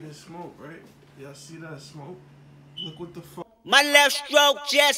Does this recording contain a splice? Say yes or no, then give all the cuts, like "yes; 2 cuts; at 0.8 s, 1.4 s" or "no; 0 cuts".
yes; 1 cut; at 3.5 s